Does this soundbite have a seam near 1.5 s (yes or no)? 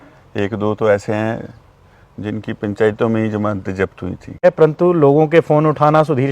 no